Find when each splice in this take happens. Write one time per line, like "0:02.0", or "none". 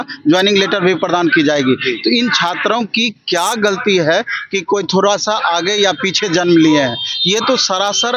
none